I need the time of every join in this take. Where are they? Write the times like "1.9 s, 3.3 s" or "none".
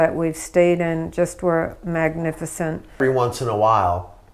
3.0 s